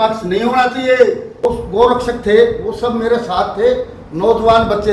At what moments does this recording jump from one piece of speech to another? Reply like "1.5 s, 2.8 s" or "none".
1.4 s